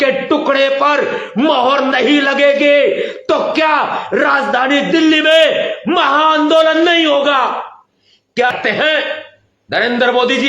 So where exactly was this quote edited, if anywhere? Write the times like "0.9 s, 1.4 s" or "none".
8.5 s